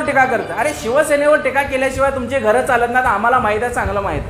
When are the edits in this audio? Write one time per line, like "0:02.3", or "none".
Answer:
none